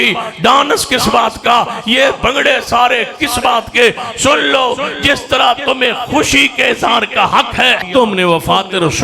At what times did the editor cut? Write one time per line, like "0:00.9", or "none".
0:07.8